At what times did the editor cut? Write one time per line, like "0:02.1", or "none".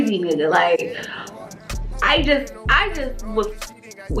none